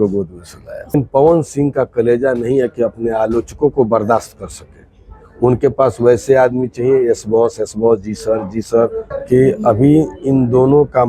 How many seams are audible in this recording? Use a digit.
2